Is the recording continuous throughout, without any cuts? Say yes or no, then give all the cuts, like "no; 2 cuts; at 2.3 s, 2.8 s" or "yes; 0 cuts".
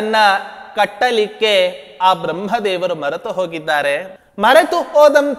no; 1 cut; at 4.2 s